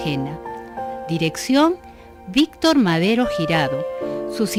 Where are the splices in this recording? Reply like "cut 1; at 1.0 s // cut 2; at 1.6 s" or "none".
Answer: none